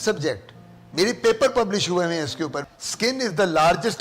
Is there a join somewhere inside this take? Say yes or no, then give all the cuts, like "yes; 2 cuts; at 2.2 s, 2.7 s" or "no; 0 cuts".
yes; 1 cut; at 2.6 s